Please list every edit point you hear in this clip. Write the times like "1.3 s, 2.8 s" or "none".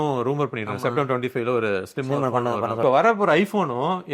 2.8 s